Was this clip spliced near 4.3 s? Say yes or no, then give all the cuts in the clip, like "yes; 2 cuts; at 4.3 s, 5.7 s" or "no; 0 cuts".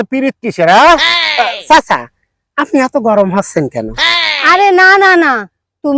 yes; 1 cut; at 4.3 s